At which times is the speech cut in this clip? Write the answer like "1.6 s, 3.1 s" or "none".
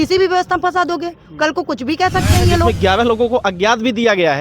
2.7 s